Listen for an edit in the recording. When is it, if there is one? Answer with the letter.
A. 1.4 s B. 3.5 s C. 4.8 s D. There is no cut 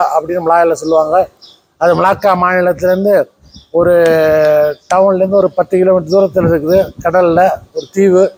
D